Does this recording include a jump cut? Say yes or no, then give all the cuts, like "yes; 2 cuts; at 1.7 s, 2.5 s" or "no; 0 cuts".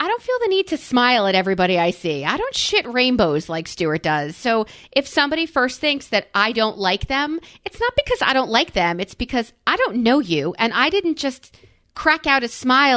no; 0 cuts